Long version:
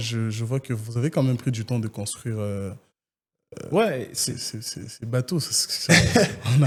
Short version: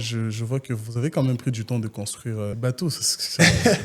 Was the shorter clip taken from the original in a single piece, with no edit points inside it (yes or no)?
no